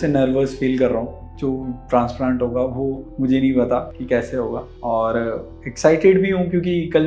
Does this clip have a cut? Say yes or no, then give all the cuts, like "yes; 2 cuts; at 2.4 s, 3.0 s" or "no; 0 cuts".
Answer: yes; 1 cut; at 1.3 s